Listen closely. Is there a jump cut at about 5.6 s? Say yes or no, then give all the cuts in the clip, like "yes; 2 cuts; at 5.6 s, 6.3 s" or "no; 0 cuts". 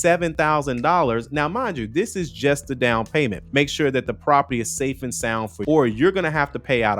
yes; 2 cuts; at 3.4 s, 5.6 s